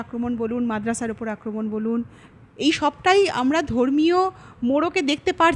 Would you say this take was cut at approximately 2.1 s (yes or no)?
no